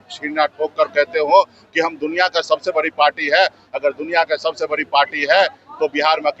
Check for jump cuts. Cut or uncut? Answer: uncut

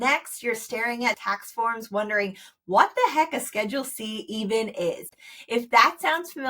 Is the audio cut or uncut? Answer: cut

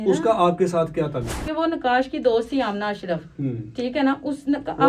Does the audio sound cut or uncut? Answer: cut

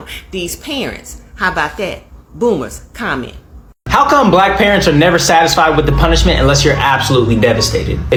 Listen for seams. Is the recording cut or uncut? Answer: uncut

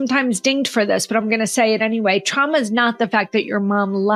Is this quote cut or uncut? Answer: uncut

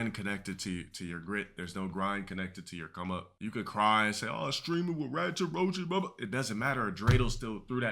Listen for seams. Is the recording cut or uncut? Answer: uncut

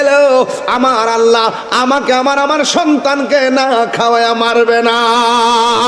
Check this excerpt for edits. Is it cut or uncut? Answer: uncut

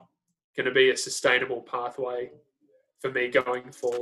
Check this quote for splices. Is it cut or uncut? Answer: uncut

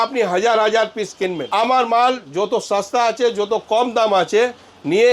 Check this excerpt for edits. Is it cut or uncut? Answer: cut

